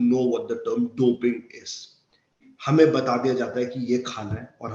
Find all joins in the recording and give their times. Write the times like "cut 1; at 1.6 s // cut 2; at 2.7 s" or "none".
cut 1; at 2.4 s